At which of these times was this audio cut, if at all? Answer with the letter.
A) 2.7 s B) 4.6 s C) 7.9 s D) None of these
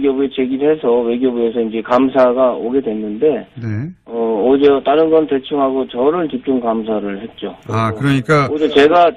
C